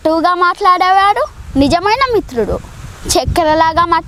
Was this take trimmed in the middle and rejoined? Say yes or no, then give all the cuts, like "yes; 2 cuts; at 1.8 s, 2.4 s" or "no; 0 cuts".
no; 0 cuts